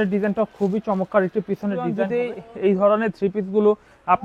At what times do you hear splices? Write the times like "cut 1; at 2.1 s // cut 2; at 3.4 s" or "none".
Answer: cut 1; at 2.0 s

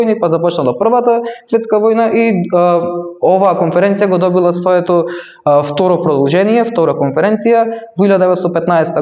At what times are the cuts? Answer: none

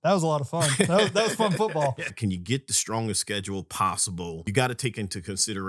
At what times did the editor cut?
cut 1; at 2.1 s // cut 2; at 4.4 s

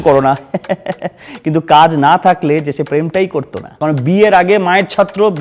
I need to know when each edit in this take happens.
cut 1; at 3.7 s

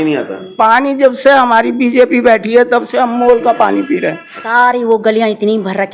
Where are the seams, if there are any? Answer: cut 1; at 4.5 s

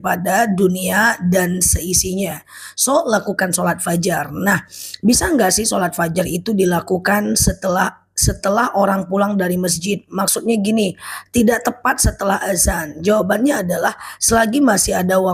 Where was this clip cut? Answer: none

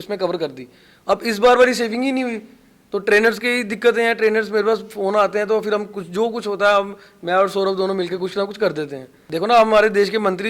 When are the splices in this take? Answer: cut 1; at 9.2 s

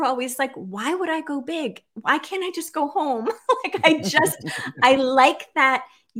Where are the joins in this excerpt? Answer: none

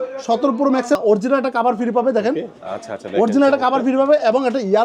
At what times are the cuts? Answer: cut 1; at 1.0 s

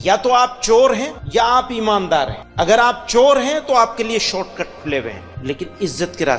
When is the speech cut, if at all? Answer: cut 1; at 1.1 s // cut 2; at 2.4 s // cut 3; at 5.3 s

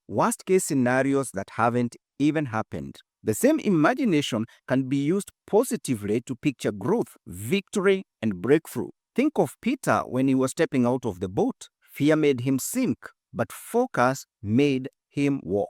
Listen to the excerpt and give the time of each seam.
none

